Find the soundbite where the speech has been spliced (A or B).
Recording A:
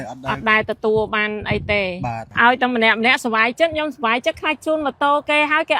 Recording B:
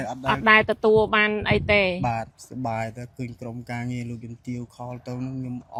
A